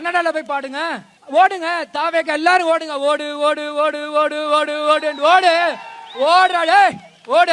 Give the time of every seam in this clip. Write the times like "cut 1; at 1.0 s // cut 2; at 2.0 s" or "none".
cut 1; at 1.1 s